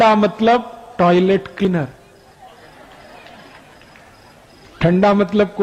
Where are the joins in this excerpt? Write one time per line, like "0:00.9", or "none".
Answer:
0:01.7